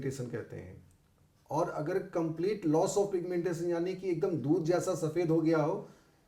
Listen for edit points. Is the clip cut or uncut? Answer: uncut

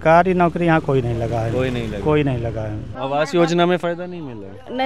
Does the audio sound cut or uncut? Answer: cut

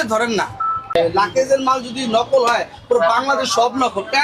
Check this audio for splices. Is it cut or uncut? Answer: cut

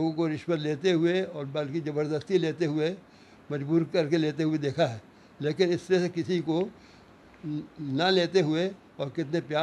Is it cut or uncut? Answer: uncut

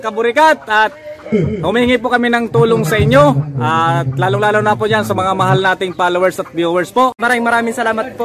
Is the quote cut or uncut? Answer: cut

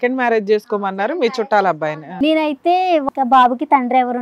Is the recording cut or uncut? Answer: cut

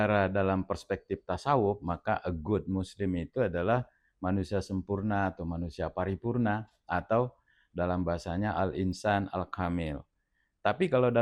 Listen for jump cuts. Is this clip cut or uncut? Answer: uncut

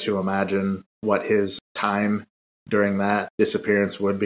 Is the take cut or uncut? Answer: cut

